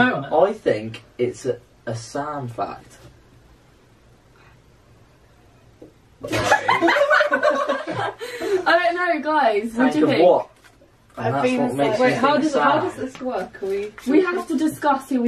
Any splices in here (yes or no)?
yes